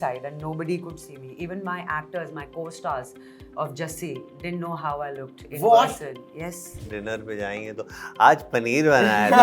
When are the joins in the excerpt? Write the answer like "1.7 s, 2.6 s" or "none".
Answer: 6.9 s